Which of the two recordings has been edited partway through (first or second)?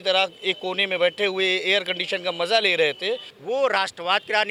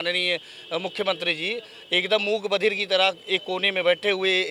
first